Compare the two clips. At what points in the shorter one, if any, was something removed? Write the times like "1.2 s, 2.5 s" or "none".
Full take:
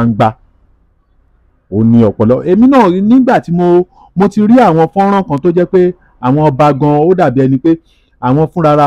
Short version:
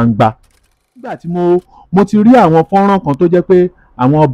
1.3 s